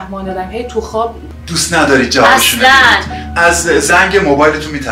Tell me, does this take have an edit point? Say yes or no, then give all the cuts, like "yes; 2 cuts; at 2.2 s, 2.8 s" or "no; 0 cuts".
yes; 1 cut; at 1.3 s